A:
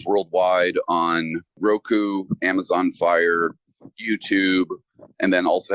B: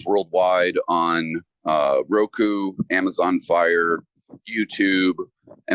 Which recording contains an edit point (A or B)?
A